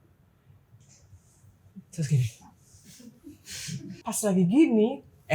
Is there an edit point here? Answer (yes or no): yes